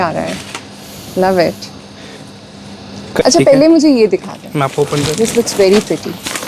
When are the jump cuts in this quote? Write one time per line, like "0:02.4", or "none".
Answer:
0:03.2